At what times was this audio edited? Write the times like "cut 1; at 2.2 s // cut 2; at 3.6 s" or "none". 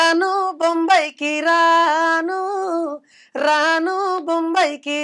none

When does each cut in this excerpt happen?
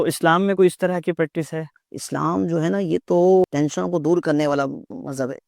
cut 1; at 1.7 s // cut 2; at 3.5 s

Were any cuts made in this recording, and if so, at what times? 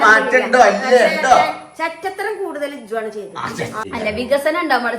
cut 1; at 3.8 s

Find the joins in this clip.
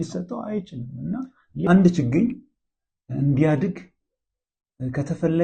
cut 1; at 1.7 s

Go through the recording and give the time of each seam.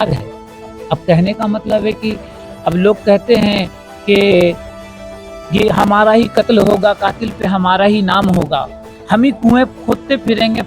none

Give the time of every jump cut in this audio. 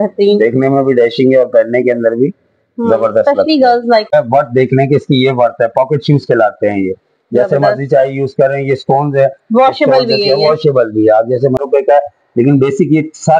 cut 1; at 4.1 s // cut 2; at 11.6 s

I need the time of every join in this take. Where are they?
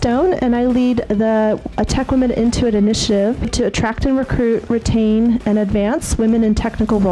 cut 1; at 3.5 s

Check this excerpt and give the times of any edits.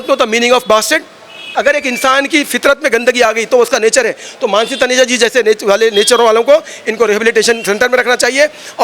cut 1; at 1.5 s

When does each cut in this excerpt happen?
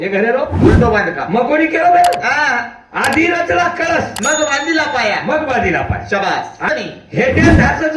cut 1; at 6.7 s

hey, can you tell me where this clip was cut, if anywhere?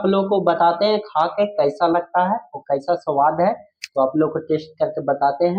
none

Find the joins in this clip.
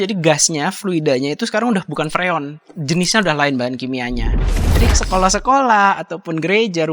cut 1; at 4.5 s

